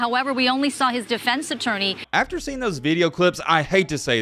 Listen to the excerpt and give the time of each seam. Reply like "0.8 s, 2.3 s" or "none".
1.9 s